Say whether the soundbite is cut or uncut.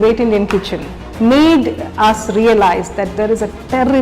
cut